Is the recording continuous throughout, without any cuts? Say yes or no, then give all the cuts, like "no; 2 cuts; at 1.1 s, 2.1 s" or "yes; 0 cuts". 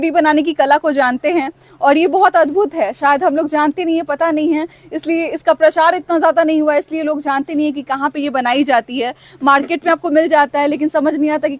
yes; 0 cuts